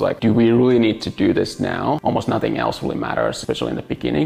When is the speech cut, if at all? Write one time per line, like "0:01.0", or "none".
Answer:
0:02.0
0:03.4